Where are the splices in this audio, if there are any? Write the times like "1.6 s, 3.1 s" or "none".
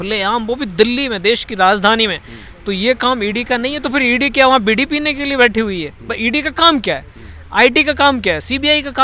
none